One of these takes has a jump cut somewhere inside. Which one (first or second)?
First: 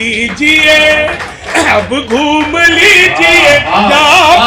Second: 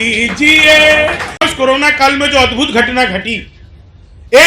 second